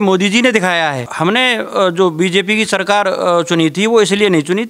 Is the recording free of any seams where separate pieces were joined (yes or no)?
no